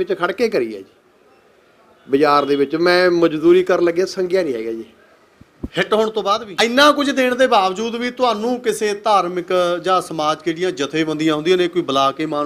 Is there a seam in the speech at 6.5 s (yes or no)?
yes